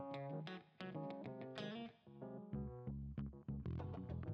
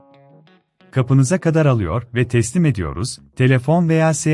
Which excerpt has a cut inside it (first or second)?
second